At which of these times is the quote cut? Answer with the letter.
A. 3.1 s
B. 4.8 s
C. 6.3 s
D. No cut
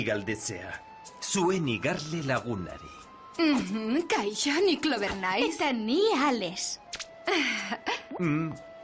D